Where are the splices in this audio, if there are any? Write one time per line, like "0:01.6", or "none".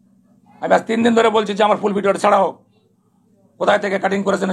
none